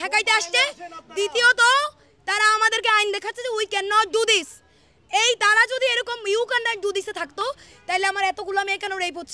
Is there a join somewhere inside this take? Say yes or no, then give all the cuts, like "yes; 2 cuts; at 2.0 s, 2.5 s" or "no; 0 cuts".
no; 0 cuts